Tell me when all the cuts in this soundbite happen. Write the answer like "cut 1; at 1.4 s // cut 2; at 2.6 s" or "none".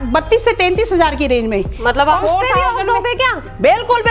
cut 1; at 2.2 s